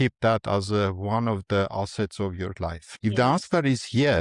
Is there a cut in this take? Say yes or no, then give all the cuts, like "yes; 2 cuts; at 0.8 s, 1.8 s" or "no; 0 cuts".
yes; 1 cut; at 2.8 s